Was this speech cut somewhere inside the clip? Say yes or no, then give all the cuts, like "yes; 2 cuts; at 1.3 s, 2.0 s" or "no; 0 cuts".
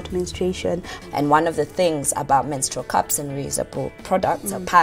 yes; 1 cut; at 0.9 s